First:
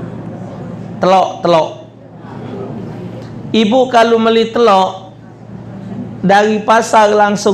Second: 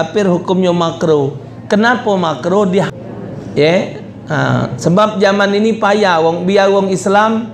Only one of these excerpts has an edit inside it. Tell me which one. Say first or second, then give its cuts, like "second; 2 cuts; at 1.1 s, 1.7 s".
second; 1 cut; at 2.9 s